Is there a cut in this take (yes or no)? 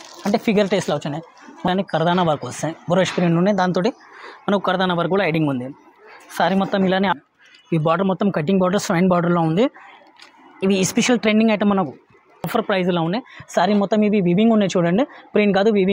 yes